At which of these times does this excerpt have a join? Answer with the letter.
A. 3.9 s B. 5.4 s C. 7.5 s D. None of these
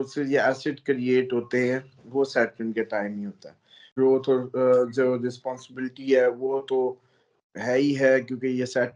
A